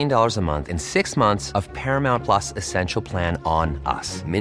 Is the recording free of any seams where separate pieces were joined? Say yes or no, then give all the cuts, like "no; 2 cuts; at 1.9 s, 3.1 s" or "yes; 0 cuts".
yes; 0 cuts